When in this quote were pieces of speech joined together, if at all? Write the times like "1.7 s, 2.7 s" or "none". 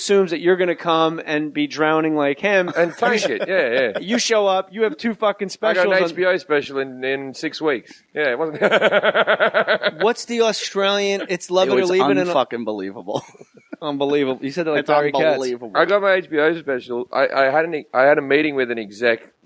17.9 s